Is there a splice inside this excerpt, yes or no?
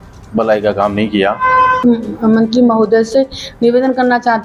yes